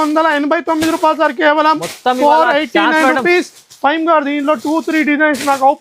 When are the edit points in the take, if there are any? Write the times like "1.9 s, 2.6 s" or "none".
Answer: none